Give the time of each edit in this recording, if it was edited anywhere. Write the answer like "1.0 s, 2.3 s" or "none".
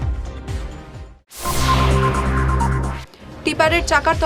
3.0 s